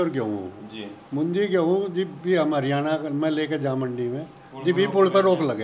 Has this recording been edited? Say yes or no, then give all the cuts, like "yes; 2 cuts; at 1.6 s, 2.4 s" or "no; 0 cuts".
no; 0 cuts